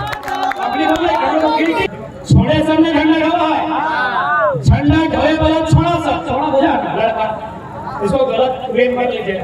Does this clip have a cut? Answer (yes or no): yes